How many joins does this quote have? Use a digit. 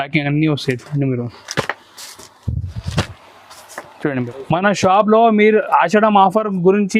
1